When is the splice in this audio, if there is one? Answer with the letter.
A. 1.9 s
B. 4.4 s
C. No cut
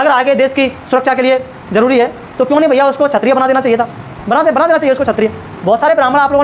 C